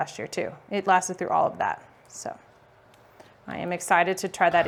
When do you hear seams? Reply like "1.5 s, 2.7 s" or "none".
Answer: none